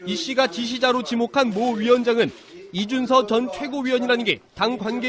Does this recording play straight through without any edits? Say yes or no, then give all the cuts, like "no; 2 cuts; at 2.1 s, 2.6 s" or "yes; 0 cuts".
yes; 0 cuts